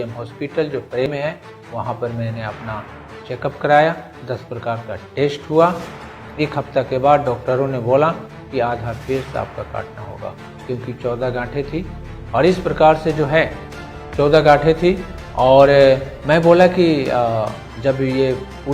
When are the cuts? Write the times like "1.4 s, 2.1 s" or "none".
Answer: 1.1 s